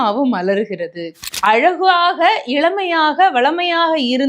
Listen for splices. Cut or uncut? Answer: cut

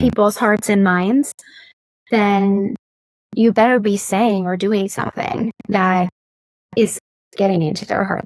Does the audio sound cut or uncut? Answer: uncut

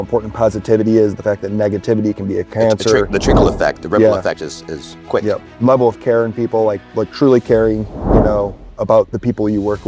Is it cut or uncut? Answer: uncut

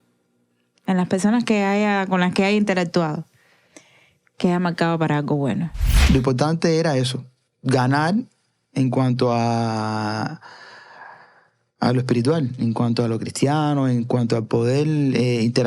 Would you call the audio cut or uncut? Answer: cut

